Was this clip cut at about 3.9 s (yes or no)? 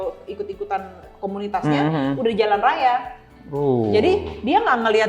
no